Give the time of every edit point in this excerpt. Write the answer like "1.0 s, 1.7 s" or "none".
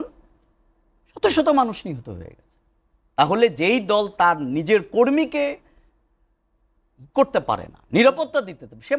none